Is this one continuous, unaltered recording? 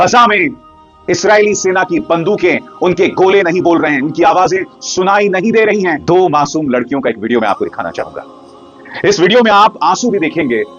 no; 1 cut; at 6.0 s

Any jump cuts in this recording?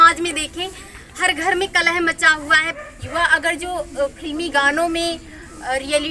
yes; 1 cut; at 2.7 s

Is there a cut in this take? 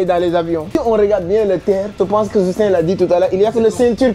yes; 2 cuts; at 0.8 s, 1.9 s

